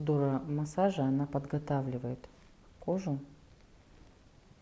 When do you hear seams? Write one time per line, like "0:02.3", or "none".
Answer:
none